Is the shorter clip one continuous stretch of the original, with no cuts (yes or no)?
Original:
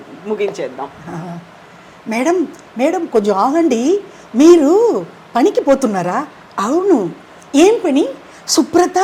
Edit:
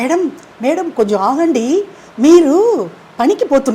yes